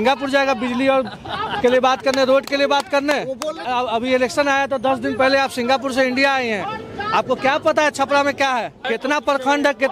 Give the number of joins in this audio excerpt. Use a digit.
2